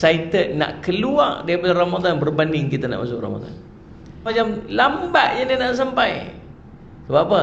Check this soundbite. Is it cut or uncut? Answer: cut